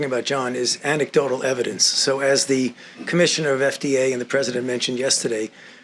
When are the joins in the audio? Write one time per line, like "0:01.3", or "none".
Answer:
none